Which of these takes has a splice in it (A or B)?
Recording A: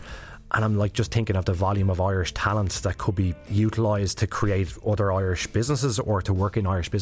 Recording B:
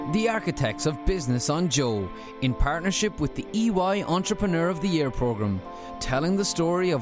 A